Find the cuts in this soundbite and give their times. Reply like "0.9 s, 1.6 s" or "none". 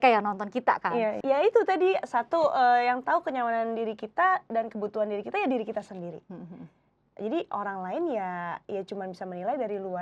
1.2 s